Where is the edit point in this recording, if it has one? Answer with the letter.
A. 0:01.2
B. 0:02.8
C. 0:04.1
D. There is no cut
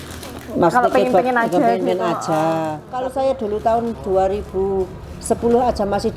B